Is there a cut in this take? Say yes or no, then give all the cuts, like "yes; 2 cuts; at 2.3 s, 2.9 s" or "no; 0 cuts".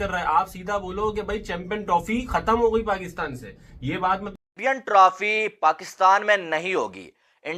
yes; 1 cut; at 4.5 s